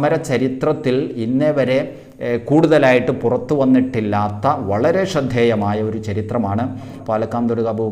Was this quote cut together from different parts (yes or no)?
yes